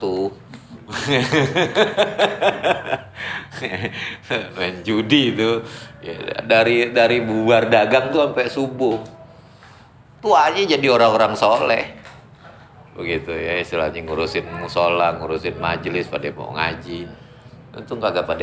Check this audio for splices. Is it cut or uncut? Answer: uncut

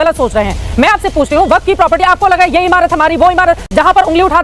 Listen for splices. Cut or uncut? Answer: uncut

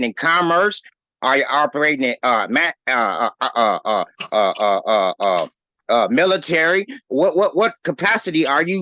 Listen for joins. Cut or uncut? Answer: uncut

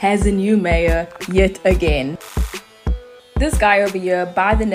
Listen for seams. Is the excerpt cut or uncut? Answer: uncut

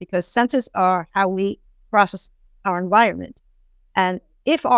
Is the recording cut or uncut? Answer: uncut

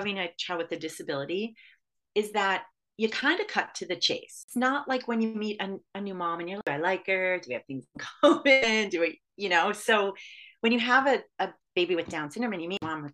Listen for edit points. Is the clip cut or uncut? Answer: cut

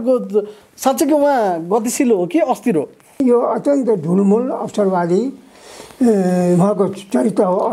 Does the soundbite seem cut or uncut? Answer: cut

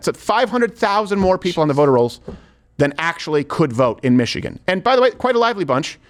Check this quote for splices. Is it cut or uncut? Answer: uncut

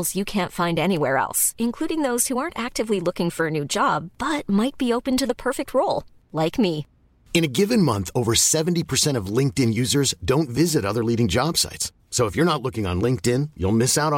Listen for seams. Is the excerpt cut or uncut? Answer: uncut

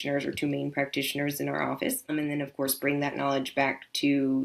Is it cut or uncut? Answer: cut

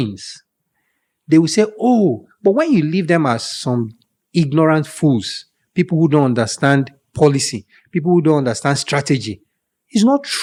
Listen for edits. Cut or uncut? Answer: uncut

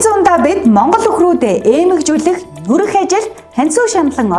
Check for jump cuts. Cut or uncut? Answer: uncut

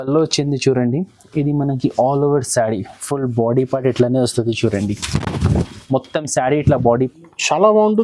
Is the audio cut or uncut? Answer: cut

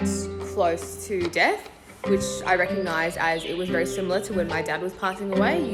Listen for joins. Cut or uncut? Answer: uncut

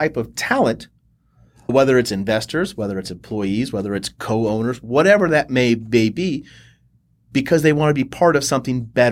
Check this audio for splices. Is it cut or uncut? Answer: cut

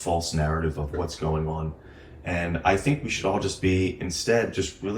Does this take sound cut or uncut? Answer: cut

